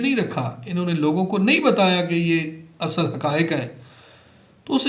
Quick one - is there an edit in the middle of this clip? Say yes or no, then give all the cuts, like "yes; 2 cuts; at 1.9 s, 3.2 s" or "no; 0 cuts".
no; 0 cuts